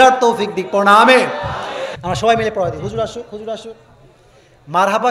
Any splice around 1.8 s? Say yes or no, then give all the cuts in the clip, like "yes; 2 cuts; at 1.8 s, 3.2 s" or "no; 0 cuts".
yes; 1 cut; at 1.8 s